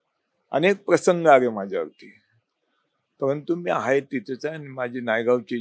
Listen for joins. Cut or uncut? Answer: uncut